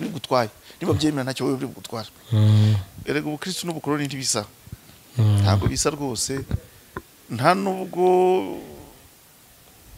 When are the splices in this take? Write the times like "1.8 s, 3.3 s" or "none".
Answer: 2.9 s